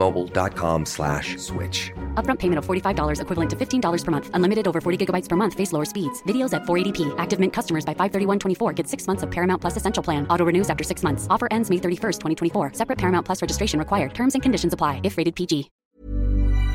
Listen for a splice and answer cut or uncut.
cut